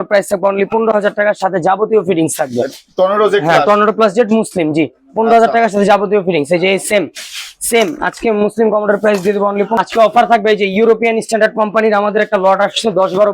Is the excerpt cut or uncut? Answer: uncut